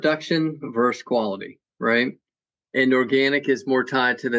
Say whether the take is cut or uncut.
uncut